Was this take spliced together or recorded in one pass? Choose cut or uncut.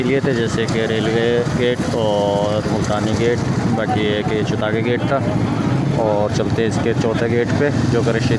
uncut